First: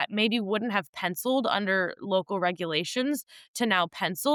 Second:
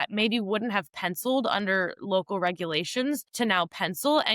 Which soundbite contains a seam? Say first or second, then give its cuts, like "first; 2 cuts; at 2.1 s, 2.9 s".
second; 1 cut; at 3.3 s